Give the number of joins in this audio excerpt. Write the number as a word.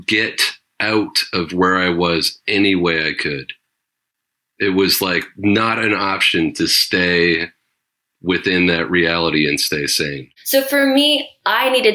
zero